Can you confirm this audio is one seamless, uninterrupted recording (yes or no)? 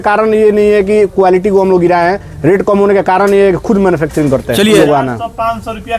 no